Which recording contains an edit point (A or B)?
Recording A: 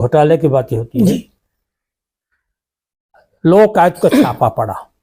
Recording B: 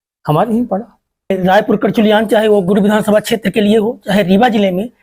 B